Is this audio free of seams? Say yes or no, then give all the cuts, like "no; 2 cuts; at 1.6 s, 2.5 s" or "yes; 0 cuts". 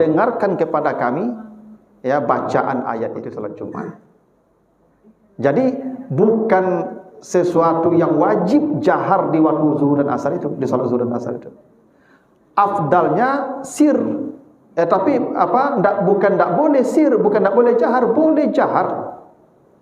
no; 1 cut; at 3.2 s